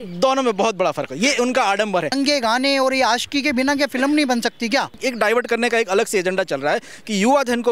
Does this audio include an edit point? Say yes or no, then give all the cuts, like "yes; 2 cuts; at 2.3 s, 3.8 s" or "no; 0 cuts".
yes; 2 cuts; at 2.1 s, 5.0 s